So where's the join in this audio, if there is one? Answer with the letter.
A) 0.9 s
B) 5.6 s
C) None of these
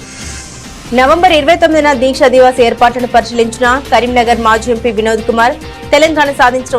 A